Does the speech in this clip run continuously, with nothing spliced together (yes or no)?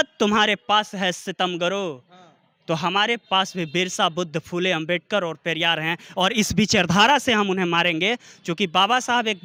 yes